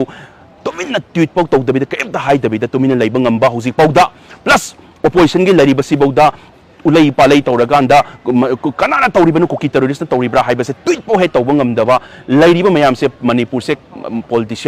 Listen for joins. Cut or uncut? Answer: uncut